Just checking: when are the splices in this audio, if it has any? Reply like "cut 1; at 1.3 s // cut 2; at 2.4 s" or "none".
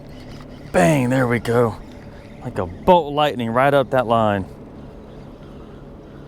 none